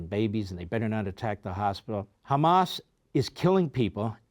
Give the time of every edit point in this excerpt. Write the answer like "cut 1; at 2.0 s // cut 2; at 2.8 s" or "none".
cut 1; at 2.1 s